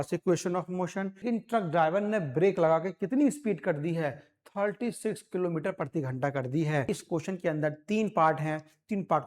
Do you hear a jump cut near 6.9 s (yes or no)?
yes